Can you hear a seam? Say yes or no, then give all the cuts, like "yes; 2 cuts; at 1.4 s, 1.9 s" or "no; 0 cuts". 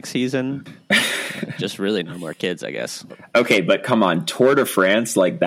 yes; 2 cuts; at 1.0 s, 3.1 s